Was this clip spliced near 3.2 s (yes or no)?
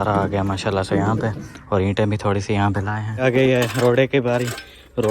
yes